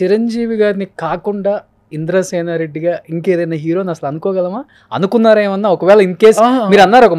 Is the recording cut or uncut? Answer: uncut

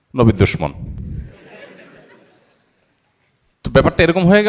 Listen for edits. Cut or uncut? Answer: uncut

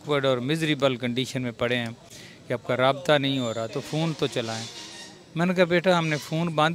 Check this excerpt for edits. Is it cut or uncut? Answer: uncut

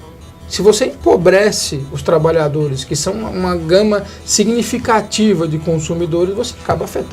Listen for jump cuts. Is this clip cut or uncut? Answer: uncut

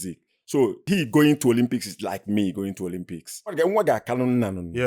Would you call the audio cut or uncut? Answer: cut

